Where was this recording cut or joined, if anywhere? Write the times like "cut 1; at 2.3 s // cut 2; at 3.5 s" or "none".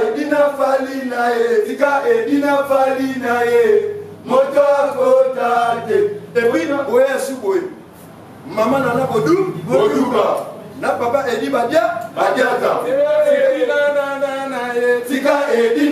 cut 1; at 12.8 s